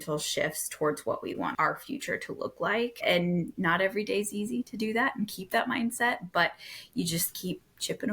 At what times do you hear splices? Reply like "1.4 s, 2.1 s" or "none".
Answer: 1.5 s, 3.0 s